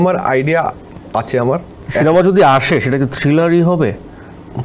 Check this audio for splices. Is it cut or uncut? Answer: cut